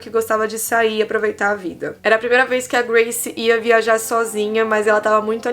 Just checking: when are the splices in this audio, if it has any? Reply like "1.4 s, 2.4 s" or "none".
1.9 s